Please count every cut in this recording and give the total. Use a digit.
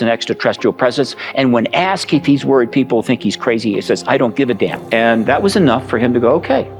1